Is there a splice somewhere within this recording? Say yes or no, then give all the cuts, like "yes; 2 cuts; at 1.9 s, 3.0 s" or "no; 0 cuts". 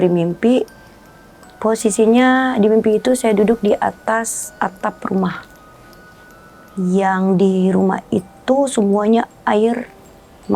no; 0 cuts